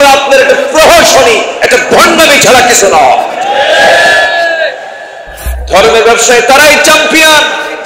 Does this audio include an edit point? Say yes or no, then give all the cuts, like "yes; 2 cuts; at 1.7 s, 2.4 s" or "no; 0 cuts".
yes; 1 cut; at 5.5 s